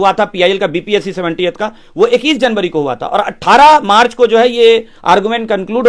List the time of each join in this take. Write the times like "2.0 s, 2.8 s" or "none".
none